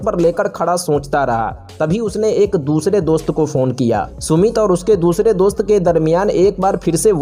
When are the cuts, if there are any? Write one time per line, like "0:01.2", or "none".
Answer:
0:04.1